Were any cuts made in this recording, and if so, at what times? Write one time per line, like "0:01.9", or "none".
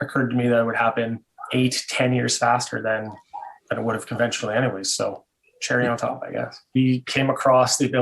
0:01.3
0:06.8